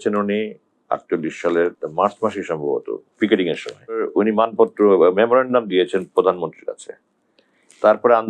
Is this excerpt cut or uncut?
cut